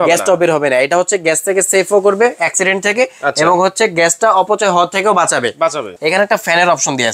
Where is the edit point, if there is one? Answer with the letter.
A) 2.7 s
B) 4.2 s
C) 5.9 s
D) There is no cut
C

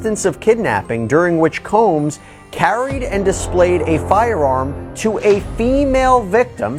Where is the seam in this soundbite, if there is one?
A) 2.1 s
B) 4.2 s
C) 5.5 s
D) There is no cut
D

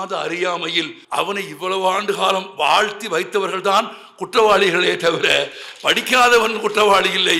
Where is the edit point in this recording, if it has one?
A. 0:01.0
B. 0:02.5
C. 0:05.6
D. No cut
A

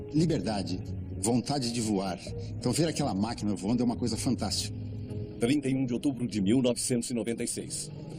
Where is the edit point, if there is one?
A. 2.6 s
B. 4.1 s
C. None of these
B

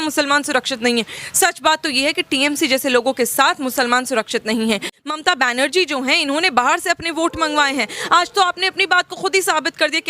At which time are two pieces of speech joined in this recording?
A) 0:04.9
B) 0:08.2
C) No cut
A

